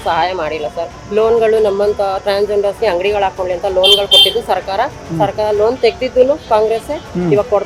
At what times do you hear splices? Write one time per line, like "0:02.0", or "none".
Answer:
none